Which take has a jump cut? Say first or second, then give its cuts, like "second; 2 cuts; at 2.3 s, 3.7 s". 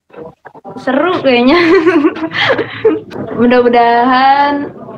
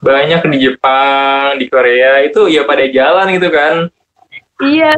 first; 1 cut; at 3.1 s